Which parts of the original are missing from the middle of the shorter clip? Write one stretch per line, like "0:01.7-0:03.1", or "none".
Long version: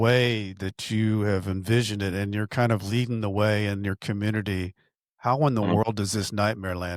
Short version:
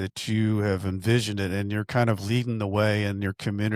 none